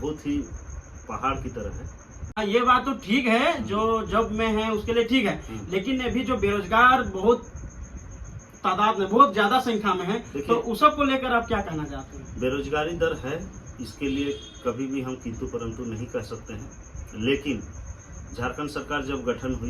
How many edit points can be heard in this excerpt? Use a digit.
1